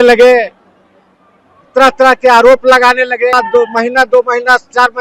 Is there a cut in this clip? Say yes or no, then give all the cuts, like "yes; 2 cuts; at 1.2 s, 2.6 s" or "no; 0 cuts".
yes; 1 cut; at 3.3 s